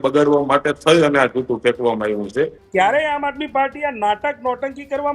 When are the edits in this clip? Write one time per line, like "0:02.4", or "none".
0:02.6